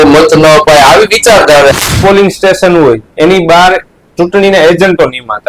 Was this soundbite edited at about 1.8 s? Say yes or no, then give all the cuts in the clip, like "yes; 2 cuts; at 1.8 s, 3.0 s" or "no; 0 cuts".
yes; 1 cut; at 1.8 s